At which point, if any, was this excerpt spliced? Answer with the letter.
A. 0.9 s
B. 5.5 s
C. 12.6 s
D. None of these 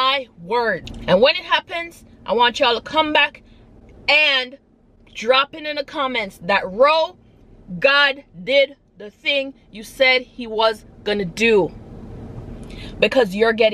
A